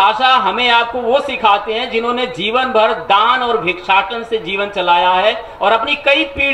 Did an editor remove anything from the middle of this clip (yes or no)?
no